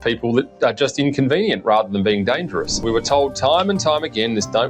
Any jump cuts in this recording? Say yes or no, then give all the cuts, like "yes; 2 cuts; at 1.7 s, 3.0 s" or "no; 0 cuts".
yes; 1 cut; at 2.8 s